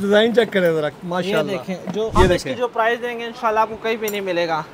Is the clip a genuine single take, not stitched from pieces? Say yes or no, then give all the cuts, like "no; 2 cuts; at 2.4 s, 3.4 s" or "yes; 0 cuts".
no; 1 cut; at 2.1 s